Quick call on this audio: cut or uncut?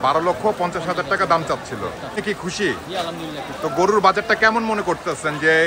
cut